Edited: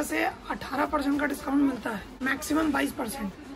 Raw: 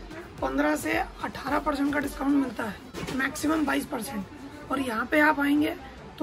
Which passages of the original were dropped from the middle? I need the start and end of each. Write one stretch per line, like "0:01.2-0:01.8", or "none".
0:02.8-0:03.0